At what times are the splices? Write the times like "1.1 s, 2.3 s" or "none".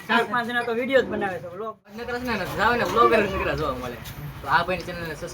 2.0 s